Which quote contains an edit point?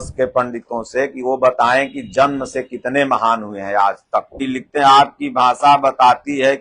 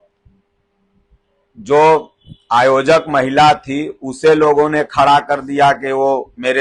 first; 1 cut; at 4.5 s

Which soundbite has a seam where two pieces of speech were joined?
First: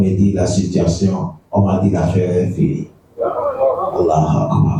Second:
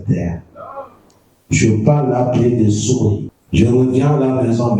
second; 1 cut; at 3.3 s

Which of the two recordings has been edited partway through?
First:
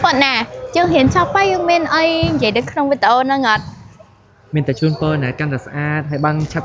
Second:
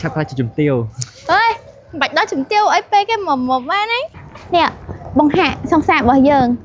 second; 1 cut; at 4.2 s

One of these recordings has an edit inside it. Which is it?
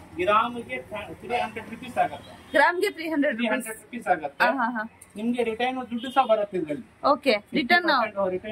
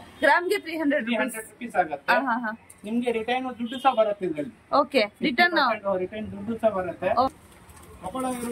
second; 1 cut; at 7.3 s

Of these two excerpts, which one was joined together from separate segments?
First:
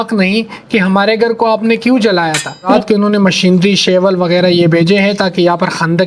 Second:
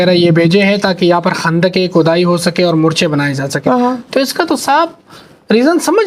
first; 1 cut; at 2.7 s

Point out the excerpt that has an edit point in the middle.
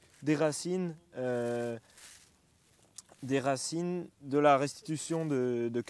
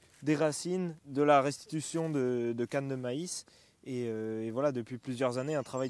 second; 1 cut; at 1.0 s

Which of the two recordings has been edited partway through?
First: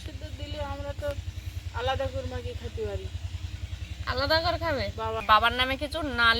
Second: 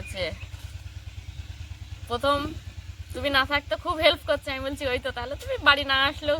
first; 1 cut; at 5.2 s

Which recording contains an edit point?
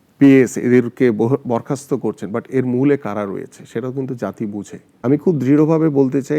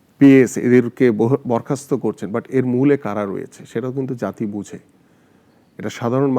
first; 1 cut; at 5.0 s

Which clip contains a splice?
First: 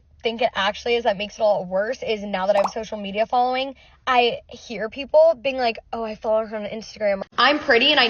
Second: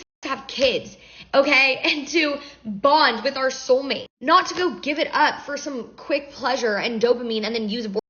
first; 1 cut; at 7.2 s

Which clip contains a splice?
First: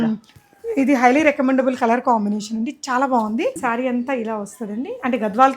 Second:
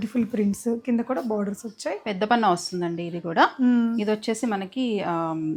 first; 1 cut; at 3.6 s

